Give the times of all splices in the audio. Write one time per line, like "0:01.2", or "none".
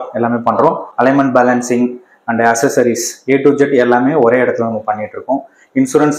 none